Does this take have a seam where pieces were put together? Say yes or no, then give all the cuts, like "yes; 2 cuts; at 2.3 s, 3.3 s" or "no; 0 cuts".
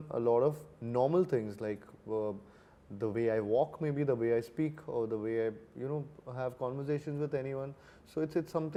no; 0 cuts